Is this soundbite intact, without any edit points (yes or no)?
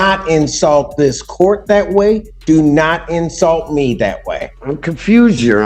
no